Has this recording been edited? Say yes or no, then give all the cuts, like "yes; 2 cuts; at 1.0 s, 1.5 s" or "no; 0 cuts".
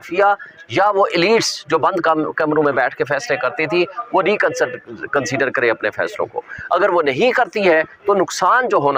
no; 0 cuts